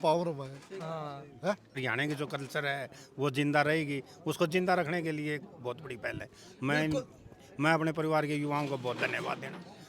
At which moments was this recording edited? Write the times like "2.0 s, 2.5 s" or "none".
1.7 s